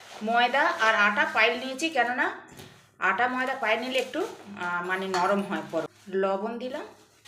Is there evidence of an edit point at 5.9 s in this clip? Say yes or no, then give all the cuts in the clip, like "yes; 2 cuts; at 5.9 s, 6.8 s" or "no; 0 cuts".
yes; 1 cut; at 5.9 s